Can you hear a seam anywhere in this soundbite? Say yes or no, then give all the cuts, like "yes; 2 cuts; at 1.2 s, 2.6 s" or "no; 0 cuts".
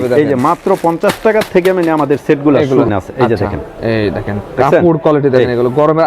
yes; 1 cut; at 2.9 s